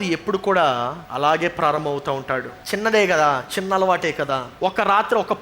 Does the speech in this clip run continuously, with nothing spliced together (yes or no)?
no